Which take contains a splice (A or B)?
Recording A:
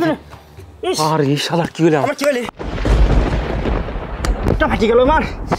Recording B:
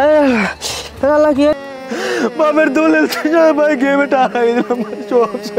B